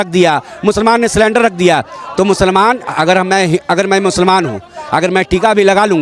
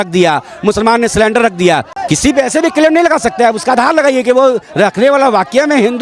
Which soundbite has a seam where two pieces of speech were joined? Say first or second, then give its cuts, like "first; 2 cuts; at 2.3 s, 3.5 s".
second; 1 cut; at 1.9 s